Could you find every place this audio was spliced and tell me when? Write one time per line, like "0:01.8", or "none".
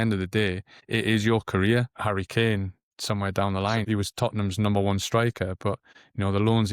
0:01.9
0:02.9
0:03.9